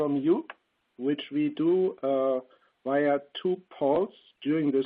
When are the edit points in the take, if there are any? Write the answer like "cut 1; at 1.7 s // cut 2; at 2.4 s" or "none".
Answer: cut 1; at 1.6 s